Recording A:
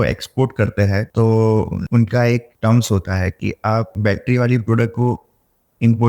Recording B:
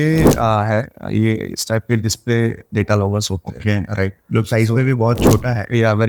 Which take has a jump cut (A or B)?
A